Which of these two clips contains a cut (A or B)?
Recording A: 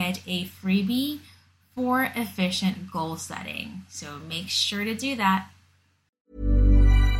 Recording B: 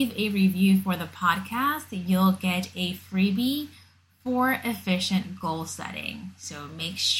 A